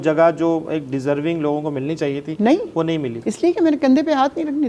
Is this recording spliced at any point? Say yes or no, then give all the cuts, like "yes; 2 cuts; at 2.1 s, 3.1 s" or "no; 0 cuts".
no; 0 cuts